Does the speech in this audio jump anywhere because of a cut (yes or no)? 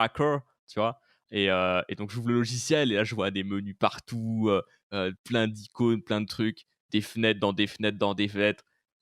no